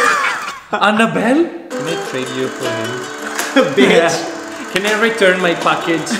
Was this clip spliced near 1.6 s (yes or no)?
yes